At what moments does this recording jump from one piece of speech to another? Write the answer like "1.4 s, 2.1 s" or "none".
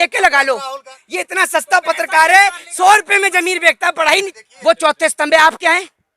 0.9 s, 4.4 s